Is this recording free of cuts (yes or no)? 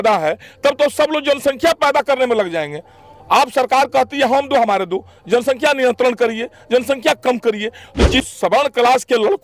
no